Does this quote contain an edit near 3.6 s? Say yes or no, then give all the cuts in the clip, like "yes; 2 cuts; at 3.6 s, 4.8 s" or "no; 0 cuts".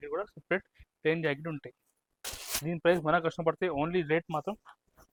no; 0 cuts